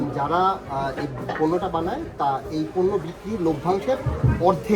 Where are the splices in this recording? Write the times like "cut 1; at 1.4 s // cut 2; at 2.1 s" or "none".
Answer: none